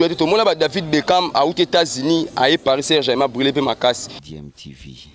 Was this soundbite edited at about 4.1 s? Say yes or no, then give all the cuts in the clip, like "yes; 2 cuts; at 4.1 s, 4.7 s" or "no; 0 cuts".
yes; 1 cut; at 4.1 s